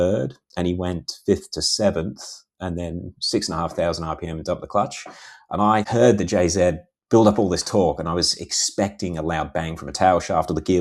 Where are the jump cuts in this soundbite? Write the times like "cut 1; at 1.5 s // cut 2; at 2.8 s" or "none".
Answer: cut 1; at 5.9 s